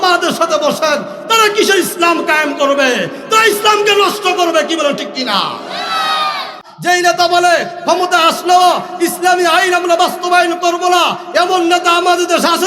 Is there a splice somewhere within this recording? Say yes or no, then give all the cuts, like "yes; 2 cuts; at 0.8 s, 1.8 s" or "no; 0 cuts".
yes; 1 cut; at 6.7 s